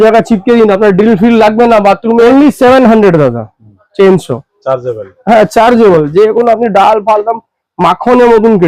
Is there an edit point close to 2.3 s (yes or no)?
yes